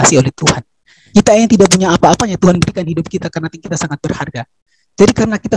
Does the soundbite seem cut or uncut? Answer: cut